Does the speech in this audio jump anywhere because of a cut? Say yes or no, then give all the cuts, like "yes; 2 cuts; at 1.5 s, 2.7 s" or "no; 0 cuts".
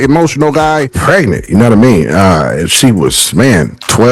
yes; 1 cut; at 0.9 s